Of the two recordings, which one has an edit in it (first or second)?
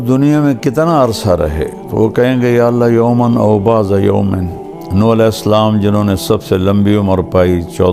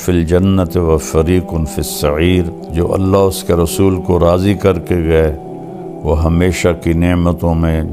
second